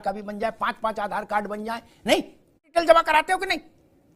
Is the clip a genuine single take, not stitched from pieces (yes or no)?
no